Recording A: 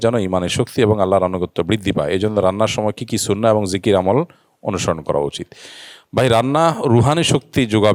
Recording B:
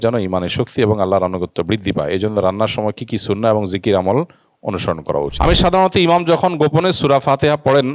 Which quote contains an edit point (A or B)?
B